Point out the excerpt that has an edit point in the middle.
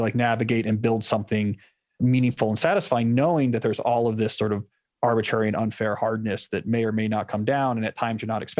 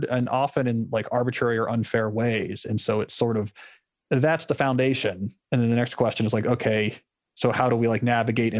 first; 1 cut; at 2.0 s

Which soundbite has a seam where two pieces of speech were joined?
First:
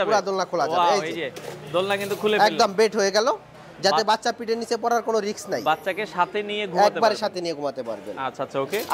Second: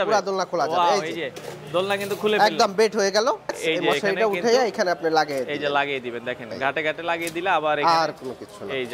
second; 1 cut; at 3.6 s

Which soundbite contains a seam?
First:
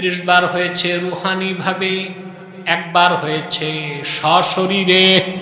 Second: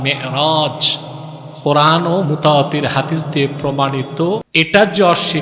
second; 1 cut; at 4.5 s

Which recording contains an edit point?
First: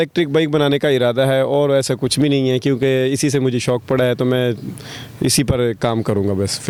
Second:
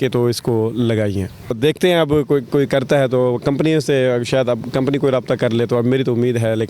second; 1 cut; at 1.6 s

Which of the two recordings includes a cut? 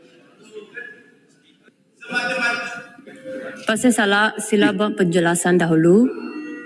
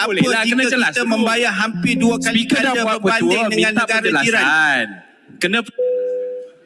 first; 1 cut; at 1.5 s

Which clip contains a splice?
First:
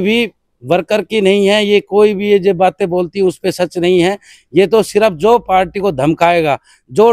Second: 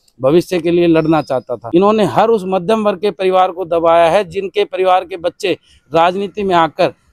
second; 1 cut; at 1.6 s

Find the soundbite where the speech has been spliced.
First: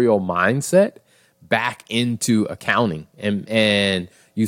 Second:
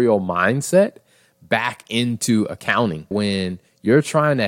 second; 1 cut; at 3.1 s

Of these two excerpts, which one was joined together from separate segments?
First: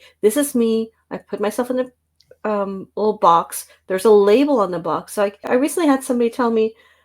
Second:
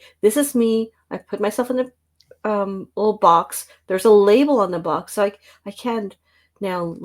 first; 1 cut; at 5.5 s

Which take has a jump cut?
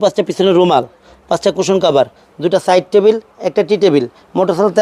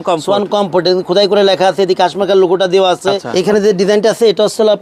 second; 1 cut; at 3.3 s

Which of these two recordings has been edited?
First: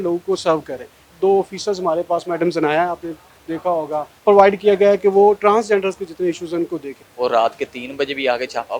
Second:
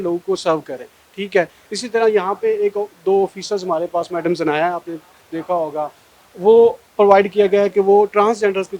first; 3 cuts; at 1.1 s, 4.1 s, 7.0 s

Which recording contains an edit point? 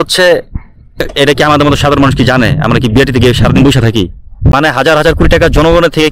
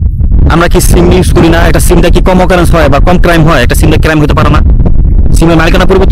first; 2 cuts; at 0.9 s, 4.5 s

